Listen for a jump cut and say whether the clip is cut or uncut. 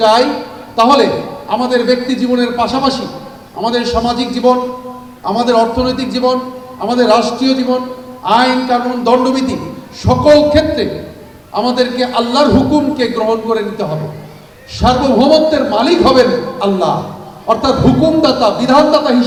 uncut